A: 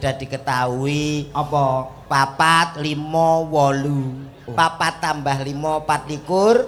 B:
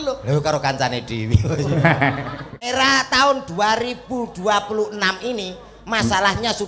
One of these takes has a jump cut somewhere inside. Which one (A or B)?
B